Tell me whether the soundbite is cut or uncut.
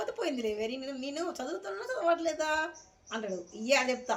uncut